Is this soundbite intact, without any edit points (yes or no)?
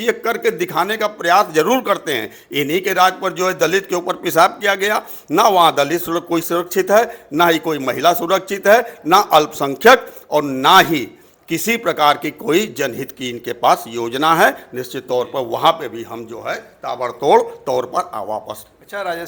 yes